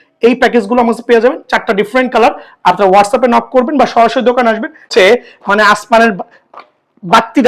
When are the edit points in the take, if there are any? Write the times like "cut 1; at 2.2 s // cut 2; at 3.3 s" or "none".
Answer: cut 1; at 4.9 s